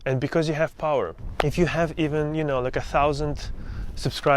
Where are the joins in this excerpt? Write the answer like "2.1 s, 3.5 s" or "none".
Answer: 1.2 s